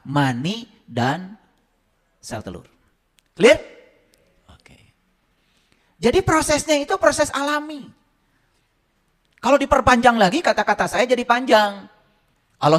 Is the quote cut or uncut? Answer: uncut